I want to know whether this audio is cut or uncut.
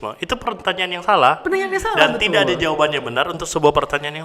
uncut